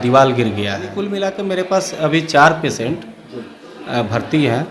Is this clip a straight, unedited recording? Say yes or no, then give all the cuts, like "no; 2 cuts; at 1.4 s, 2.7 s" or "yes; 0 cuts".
no; 1 cut; at 1.1 s